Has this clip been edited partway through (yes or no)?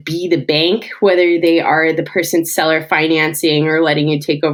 no